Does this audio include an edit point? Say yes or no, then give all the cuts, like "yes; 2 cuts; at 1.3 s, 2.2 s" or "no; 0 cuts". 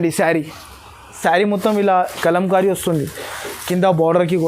yes; 1 cut; at 1.2 s